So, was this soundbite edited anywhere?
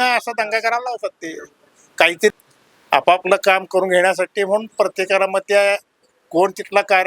yes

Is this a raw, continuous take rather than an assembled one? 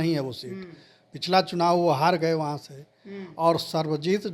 yes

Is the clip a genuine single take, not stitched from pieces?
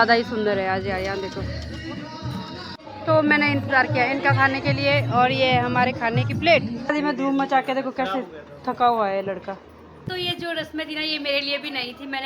no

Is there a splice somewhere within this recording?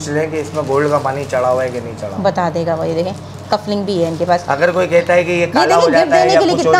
no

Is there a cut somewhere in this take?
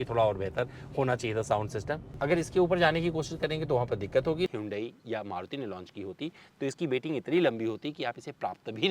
yes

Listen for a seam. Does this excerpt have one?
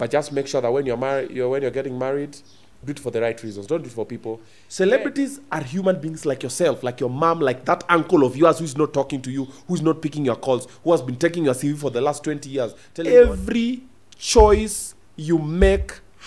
yes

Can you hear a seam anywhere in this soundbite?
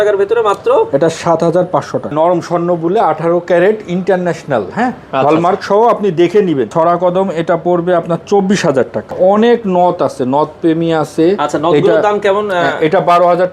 yes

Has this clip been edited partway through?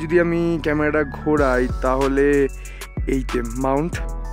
no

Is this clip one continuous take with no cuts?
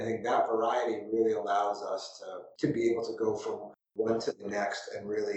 yes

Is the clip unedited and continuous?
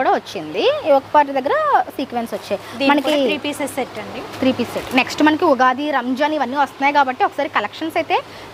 yes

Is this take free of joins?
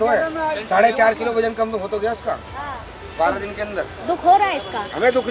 yes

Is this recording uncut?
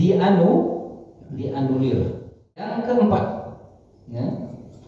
no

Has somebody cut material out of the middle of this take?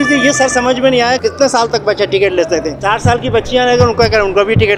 no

